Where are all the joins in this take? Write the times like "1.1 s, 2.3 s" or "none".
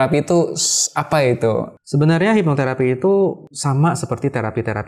1.8 s, 3.5 s